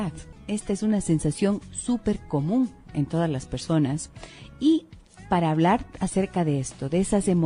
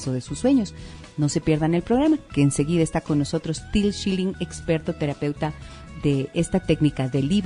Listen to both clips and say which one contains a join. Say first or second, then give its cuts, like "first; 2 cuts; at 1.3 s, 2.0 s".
first; 1 cut; at 1.4 s